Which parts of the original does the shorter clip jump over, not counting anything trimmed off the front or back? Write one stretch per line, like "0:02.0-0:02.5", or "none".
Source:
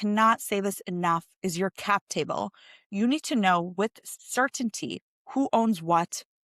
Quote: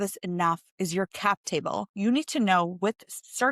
0:02.5-0:02.9